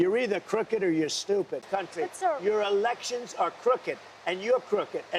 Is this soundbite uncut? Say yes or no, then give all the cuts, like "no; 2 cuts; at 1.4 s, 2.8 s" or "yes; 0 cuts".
no; 1 cut; at 1.7 s